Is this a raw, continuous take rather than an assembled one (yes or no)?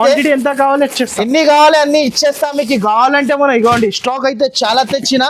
yes